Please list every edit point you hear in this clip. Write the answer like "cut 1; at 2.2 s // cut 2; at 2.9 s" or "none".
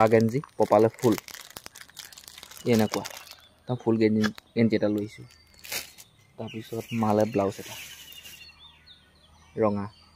none